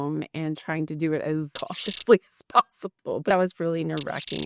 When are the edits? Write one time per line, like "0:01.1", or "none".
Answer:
none